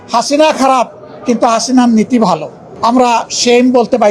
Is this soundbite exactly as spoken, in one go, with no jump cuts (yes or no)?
yes